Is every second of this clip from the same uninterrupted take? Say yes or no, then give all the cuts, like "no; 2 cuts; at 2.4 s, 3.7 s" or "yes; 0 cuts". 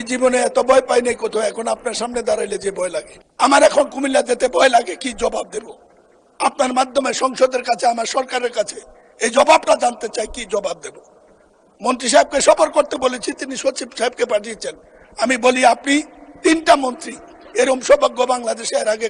no; 1 cut; at 3.2 s